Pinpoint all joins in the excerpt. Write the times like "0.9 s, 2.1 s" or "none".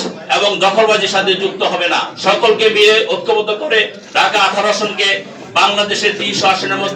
2.1 s, 4.0 s

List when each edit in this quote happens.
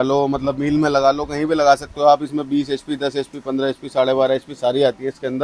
none

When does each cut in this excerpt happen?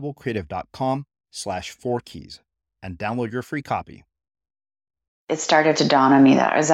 5.3 s

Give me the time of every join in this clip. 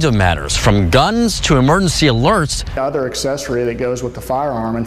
2.7 s

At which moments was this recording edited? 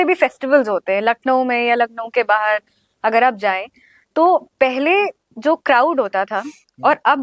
none

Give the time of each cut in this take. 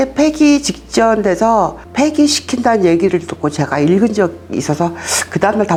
none

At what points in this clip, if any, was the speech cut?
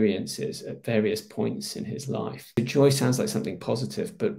2.6 s

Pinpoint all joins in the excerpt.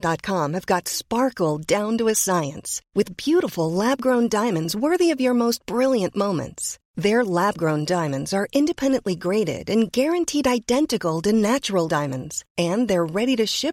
none

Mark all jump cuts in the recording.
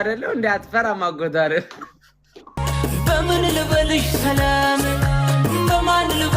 2.6 s

